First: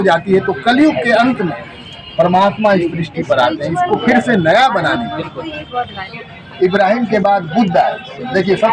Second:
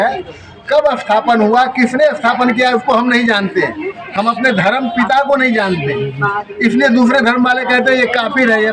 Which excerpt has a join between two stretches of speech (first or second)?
first